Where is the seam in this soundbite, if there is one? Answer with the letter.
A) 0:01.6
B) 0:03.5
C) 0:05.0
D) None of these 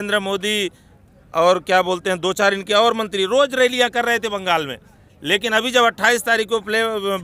D